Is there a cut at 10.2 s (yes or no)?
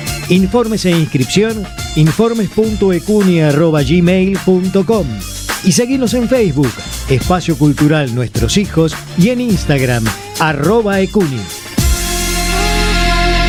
no